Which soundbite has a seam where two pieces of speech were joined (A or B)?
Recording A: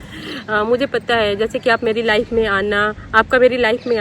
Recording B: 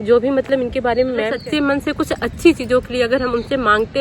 B